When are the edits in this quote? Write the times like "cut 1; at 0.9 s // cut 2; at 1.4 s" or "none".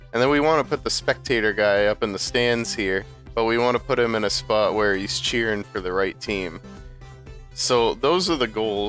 none